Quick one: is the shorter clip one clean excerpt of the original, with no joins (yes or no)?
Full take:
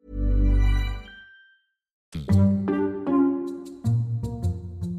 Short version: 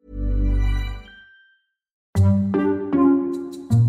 no